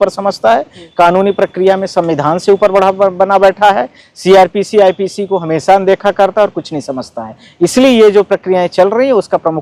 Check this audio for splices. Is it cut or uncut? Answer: uncut